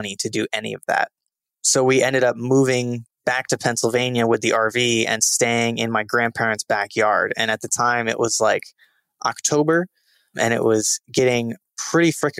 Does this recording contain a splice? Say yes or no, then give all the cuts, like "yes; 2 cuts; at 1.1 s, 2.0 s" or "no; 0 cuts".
no; 0 cuts